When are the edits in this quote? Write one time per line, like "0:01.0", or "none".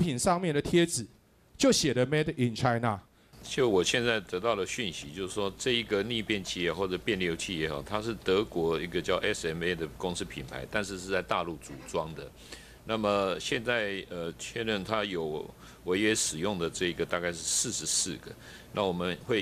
0:03.3